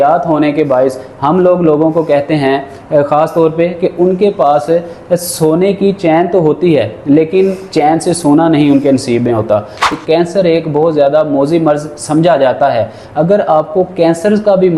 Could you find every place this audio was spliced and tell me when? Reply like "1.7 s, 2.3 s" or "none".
9.8 s